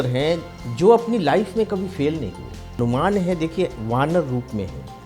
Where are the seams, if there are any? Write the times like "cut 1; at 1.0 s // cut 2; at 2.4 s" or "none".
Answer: cut 1; at 2.8 s